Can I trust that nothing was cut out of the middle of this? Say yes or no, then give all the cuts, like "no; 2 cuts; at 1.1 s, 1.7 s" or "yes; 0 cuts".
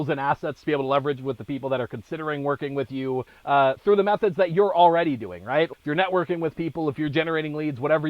no; 1 cut; at 3.3 s